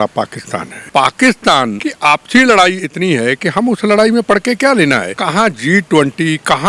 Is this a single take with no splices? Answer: no; 3 cuts; at 0.8 s, 1.8 s, 5.1 s

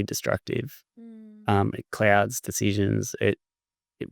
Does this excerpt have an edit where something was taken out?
no; 0 cuts

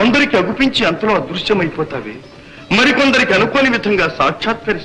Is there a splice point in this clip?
no; 0 cuts

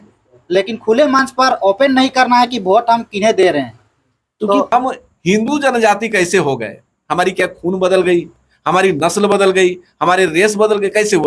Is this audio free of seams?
no; 1 cut; at 4.7 s

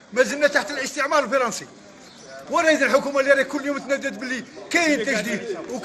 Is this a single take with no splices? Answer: yes; 0 cuts

